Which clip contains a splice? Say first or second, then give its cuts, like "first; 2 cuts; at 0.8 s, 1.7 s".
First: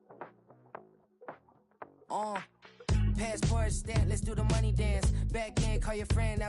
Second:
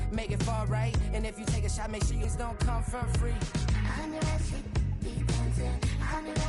second; 1 cut; at 2.2 s